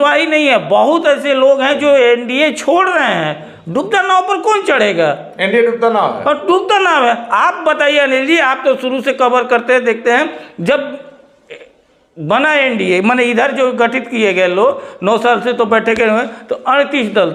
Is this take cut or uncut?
uncut